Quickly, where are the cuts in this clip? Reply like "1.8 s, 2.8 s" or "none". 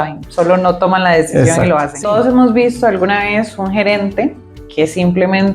1.9 s